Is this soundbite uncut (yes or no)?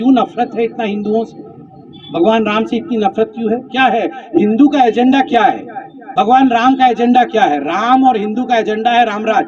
yes